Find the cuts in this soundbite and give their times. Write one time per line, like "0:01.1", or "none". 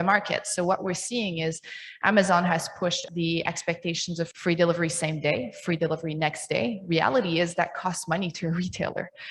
0:03.0
0:04.3